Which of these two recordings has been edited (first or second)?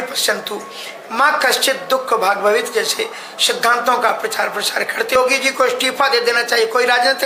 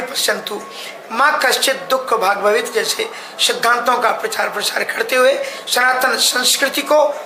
first